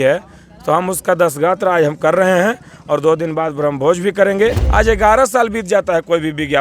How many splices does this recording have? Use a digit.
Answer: 1